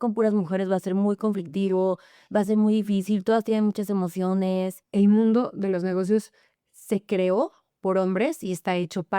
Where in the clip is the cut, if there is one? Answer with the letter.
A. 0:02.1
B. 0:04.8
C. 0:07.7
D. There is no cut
B